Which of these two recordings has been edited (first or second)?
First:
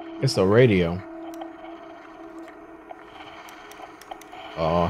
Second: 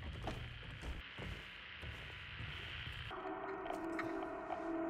second